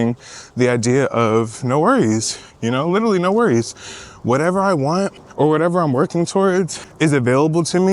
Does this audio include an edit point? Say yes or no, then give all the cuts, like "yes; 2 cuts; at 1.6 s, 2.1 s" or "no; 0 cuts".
yes; 2 cuts; at 5.2 s, 6.8 s